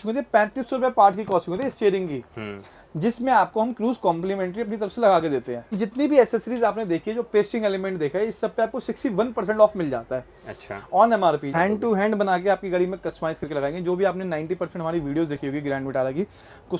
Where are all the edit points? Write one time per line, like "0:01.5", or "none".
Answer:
0:05.8
0:11.5